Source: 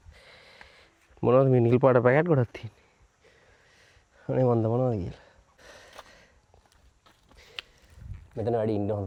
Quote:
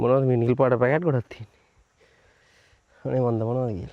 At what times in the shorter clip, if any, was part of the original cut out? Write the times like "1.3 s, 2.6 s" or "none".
none